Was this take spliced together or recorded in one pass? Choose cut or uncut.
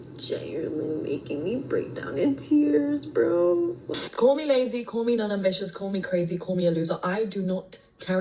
cut